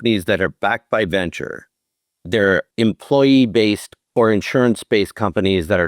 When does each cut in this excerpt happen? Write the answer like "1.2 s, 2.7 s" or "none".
2.7 s, 3.9 s

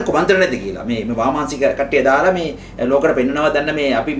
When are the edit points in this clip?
none

